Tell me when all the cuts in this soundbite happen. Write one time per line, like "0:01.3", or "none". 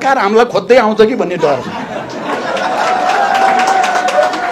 none